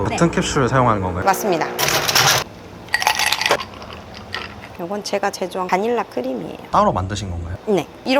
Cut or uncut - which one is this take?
uncut